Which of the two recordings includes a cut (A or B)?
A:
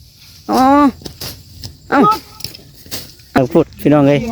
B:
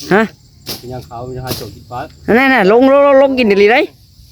A